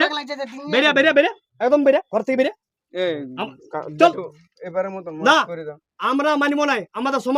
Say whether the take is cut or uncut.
uncut